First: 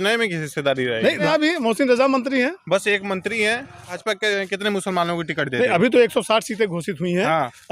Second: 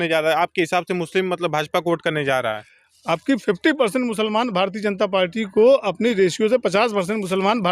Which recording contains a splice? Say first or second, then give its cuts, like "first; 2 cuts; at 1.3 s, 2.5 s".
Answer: first; 2 cuts; at 1.3 s, 3.9 s